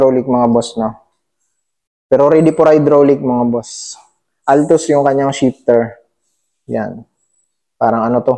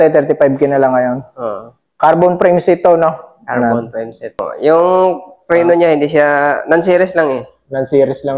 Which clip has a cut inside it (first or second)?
second